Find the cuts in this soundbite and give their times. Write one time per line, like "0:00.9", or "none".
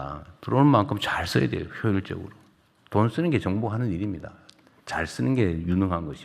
none